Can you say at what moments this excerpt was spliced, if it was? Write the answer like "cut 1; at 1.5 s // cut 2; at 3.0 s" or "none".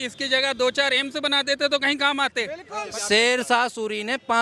cut 1; at 2.7 s